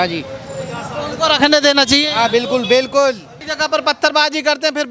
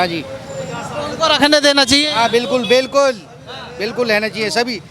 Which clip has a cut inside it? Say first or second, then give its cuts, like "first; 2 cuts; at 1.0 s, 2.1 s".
first; 1 cut; at 3.4 s